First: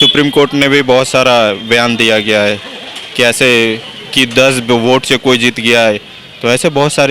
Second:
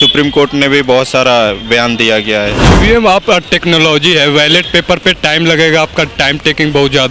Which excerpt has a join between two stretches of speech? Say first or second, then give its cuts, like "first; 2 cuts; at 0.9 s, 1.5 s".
second; 1 cut; at 2.6 s